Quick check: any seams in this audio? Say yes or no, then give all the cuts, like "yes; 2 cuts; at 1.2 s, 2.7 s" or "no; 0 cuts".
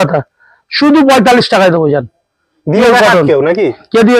no; 0 cuts